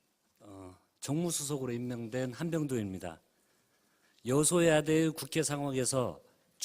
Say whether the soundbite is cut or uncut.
cut